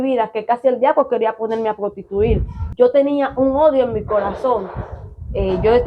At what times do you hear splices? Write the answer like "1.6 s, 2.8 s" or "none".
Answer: 2.6 s